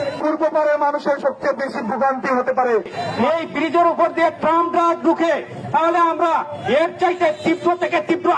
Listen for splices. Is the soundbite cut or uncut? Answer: cut